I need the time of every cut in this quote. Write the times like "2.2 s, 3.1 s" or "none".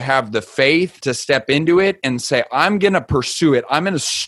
1.0 s

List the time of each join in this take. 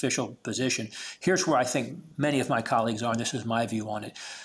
2.0 s

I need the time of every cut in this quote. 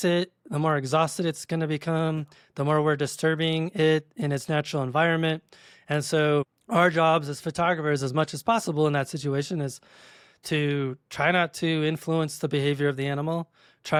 none

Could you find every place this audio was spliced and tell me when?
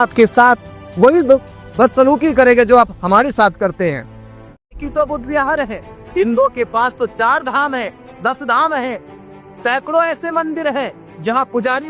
4.8 s

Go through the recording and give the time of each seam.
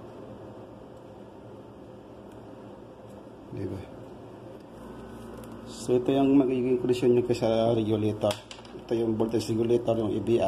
4.7 s

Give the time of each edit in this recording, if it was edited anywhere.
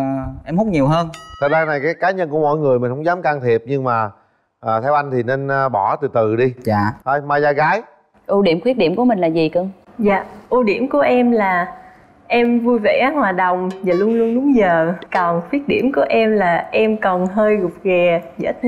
none

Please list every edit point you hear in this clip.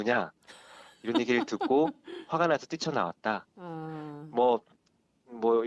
none

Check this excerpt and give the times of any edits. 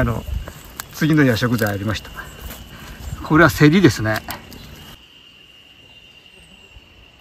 4.9 s

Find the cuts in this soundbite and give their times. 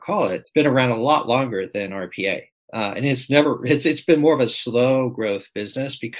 none

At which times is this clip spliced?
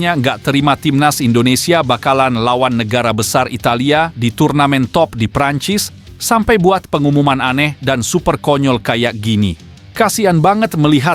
none

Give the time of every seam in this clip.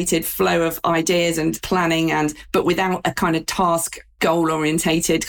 none

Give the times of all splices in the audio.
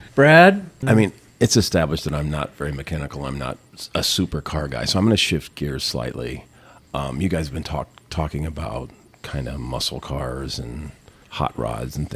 1.0 s

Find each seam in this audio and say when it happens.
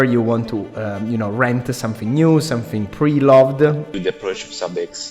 4.0 s

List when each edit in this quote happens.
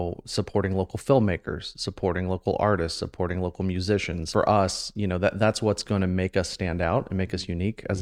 4.2 s

